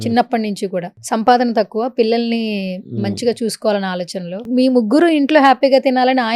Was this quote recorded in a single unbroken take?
no; 2 cuts; at 0.9 s, 4.4 s

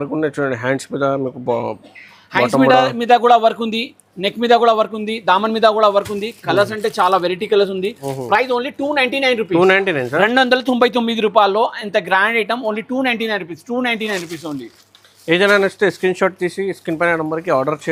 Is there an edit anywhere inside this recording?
no; 0 cuts

